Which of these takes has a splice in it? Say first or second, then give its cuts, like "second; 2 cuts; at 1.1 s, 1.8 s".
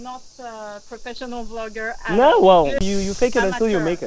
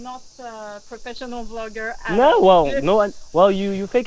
first; 1 cut; at 2.8 s